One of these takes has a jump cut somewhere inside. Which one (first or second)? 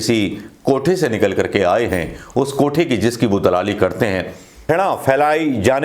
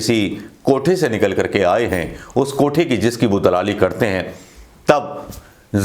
first